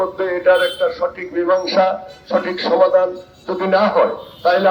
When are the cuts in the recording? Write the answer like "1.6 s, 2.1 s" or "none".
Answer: none

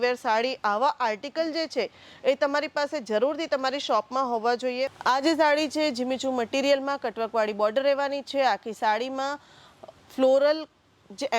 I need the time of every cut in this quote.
4.9 s

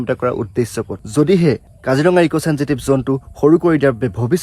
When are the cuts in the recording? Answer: 1.0 s

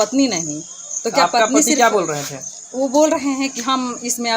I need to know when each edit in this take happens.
none

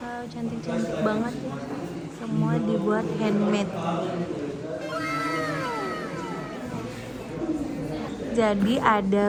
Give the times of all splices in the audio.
none

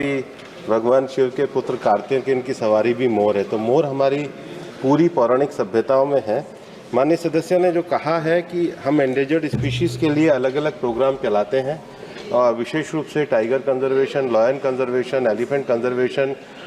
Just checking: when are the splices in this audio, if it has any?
none

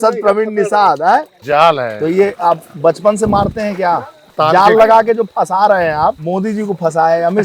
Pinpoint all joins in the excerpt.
1.4 s, 4.2 s, 6.2 s

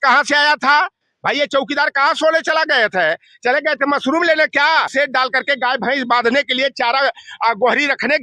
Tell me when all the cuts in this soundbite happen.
4.9 s

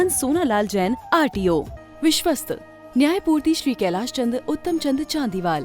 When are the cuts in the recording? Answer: 1.8 s

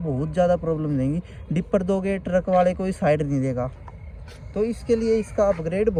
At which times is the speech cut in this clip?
none

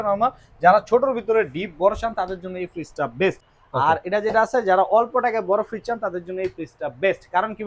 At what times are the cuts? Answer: 3.4 s

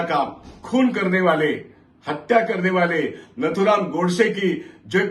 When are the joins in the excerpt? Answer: none

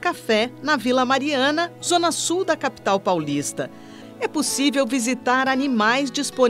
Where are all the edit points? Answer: 4.0 s

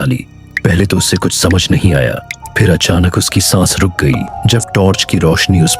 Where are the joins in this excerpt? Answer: 4.3 s

